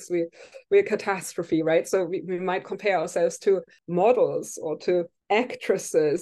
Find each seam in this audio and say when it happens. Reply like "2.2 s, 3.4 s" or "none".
3.8 s, 5.2 s